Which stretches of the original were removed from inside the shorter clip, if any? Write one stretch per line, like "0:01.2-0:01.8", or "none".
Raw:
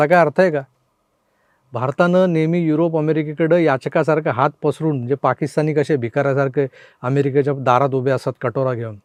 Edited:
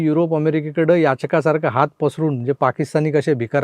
none